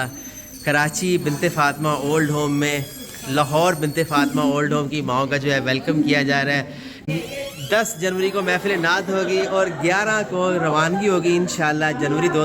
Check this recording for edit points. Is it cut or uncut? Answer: cut